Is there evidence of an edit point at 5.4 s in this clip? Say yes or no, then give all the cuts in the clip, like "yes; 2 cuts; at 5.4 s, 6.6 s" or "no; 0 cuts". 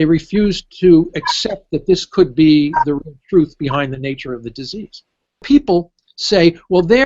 yes; 1 cut; at 5.4 s